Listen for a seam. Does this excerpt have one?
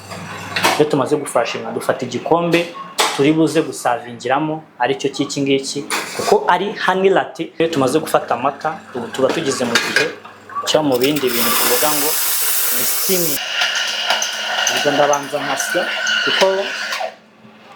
yes; 2 cuts; at 7.4 s, 13.4 s

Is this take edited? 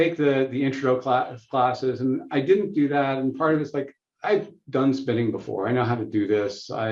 no; 0 cuts

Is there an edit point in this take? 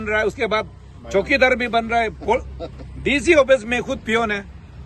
no; 0 cuts

